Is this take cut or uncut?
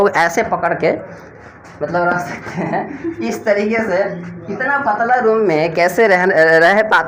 uncut